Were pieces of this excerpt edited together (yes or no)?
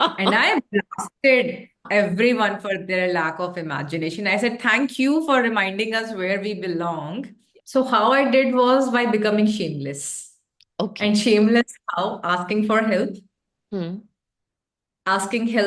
yes